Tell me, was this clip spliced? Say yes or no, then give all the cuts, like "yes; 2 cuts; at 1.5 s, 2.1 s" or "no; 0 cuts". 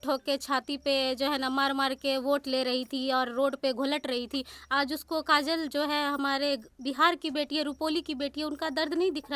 no; 0 cuts